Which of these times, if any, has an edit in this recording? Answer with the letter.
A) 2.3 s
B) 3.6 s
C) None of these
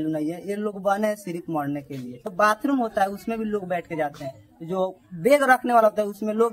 A